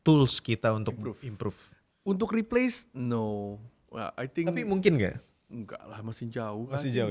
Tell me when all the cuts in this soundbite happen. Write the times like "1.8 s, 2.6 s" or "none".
none